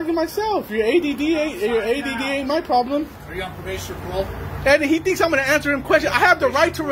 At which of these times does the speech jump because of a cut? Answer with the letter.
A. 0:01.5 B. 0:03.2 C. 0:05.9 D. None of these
B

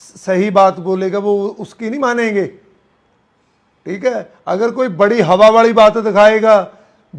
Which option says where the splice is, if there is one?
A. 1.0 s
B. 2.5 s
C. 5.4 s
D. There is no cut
D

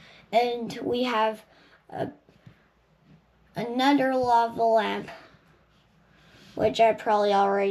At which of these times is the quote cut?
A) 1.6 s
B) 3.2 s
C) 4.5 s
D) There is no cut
D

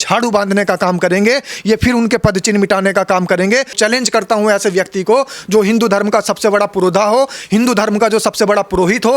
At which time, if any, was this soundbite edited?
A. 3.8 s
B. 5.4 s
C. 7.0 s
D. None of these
A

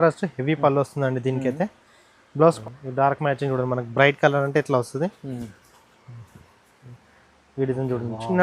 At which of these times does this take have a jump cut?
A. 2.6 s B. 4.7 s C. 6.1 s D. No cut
A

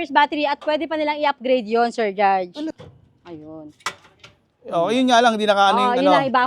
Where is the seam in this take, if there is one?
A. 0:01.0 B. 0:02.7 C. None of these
B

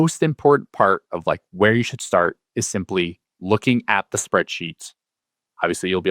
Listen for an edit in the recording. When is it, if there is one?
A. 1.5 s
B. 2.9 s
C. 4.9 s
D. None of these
D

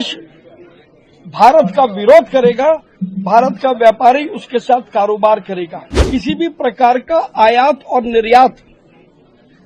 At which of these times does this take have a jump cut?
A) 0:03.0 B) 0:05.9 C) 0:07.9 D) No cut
B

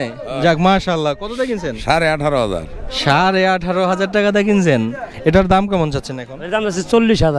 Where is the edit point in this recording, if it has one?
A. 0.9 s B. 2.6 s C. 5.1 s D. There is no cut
C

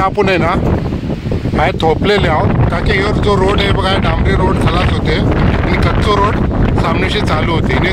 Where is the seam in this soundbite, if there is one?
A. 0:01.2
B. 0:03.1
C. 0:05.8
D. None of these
D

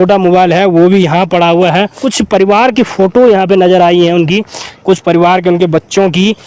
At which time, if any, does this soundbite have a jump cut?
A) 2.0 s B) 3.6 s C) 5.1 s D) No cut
A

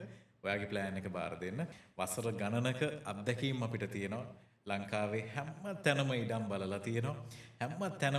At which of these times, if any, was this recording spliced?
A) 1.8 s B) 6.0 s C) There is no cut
A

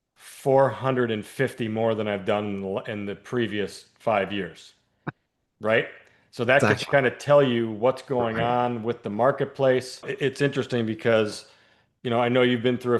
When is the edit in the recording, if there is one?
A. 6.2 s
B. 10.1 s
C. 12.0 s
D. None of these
B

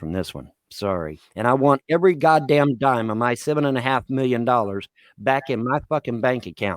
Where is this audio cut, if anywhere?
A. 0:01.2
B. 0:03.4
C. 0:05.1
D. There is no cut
A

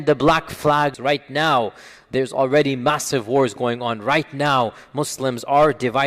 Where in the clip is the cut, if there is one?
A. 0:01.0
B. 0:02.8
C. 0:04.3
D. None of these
A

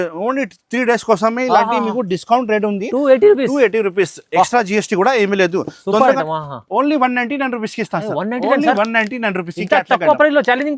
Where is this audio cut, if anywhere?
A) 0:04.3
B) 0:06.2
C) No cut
B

